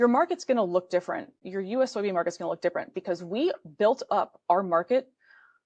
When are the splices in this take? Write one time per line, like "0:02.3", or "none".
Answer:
0:01.4